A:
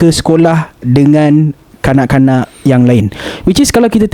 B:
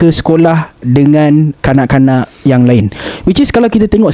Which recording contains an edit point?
B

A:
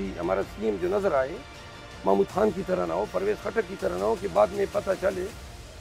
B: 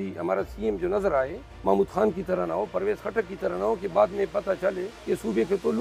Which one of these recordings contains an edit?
B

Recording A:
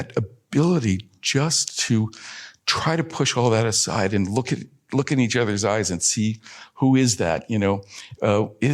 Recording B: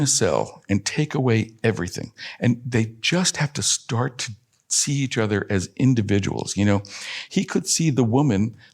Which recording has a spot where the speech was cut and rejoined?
B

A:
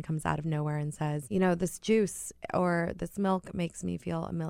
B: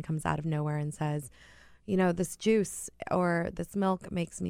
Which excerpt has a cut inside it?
A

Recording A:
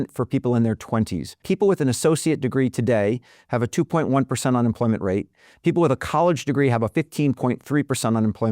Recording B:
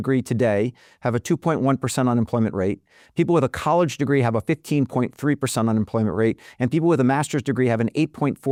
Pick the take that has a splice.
A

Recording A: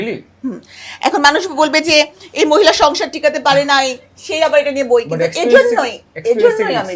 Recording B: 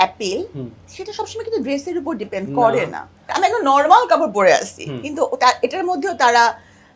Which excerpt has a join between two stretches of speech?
B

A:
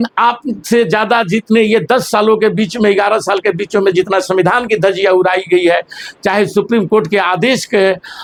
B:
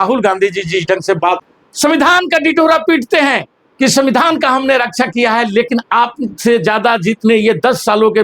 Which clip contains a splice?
B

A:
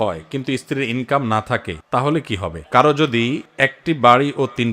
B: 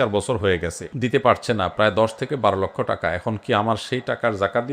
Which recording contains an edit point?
A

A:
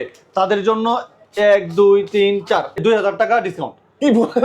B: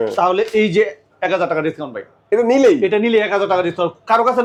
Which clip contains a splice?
A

